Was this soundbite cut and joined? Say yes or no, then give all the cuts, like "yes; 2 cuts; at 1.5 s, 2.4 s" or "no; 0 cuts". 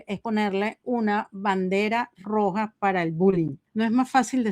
yes; 1 cut; at 3.6 s